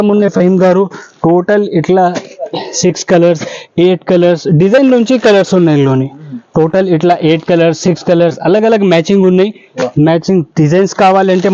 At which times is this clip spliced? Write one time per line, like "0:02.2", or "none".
none